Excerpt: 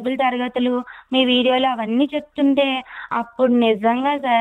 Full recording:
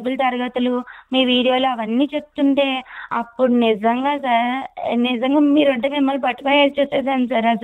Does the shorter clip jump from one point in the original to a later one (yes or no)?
no